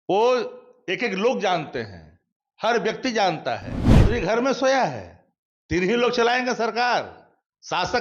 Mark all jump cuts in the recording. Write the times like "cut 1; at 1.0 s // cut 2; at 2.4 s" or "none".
cut 1; at 4.0 s